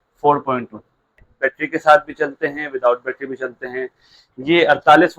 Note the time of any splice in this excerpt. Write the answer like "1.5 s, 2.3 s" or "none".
1.1 s